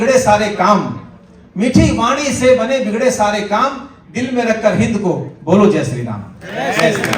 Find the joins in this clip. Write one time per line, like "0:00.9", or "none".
none